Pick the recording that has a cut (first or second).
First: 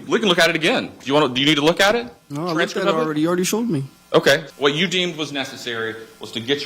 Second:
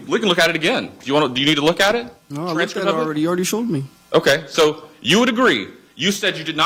first